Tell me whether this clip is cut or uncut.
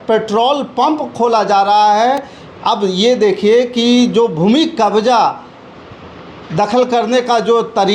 uncut